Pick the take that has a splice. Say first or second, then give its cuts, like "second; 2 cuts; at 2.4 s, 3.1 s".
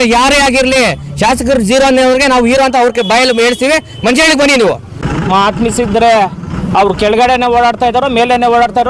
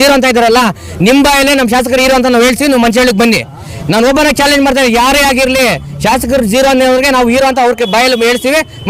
first; 1 cut; at 5.0 s